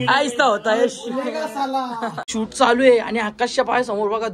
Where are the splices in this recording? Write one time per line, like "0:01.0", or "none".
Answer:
0:02.2